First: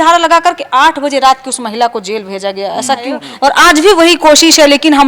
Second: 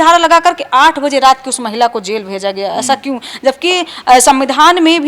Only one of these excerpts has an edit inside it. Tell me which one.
first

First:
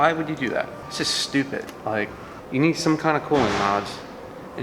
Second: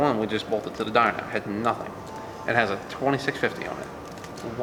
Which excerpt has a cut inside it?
first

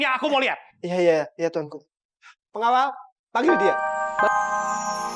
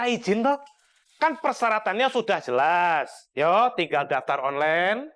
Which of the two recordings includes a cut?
first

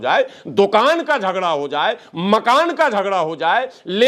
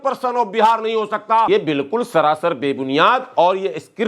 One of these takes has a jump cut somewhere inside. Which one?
second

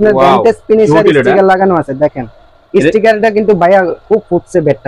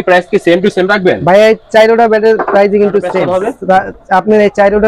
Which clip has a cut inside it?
second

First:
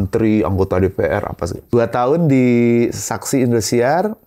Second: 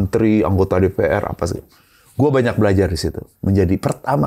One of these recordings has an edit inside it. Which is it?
first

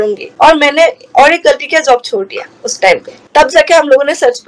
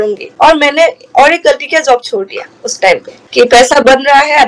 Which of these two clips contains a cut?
first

